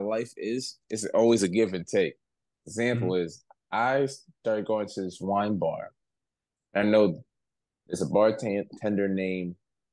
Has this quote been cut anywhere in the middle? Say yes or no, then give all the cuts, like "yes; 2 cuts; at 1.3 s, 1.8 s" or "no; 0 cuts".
no; 0 cuts